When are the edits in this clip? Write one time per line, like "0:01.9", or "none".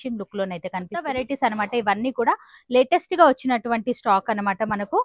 0:01.1